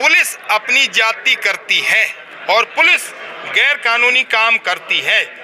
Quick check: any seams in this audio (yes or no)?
no